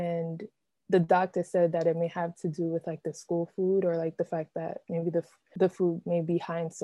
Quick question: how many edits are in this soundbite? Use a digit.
1